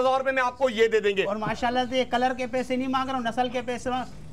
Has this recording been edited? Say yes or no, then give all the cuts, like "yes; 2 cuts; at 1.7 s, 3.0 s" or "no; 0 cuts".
no; 0 cuts